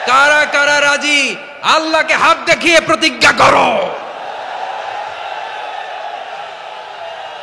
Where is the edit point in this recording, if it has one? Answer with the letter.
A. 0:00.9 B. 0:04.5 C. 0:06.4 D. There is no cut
D